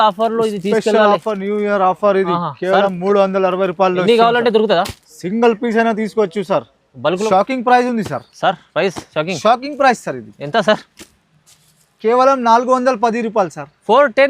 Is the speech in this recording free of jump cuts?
no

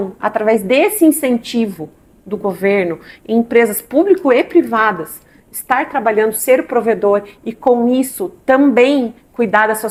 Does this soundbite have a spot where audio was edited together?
no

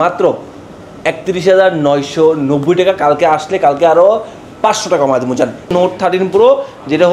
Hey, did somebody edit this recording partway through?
yes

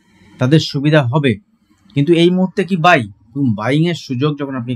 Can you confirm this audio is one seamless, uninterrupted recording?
yes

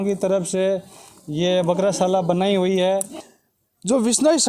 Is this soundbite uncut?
no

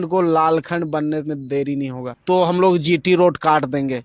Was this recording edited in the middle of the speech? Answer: yes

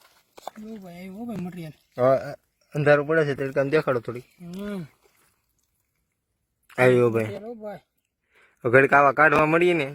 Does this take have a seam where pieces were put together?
no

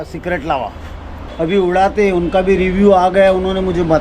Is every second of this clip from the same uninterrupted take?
no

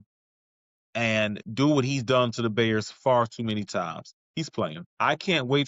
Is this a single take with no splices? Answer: yes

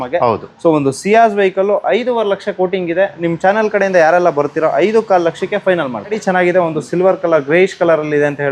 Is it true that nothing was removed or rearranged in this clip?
no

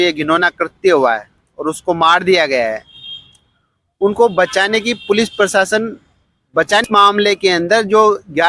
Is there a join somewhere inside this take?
yes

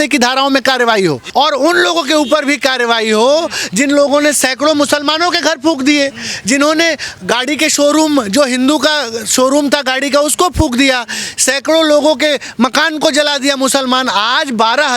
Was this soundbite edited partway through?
yes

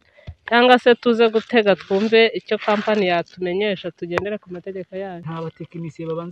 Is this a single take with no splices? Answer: no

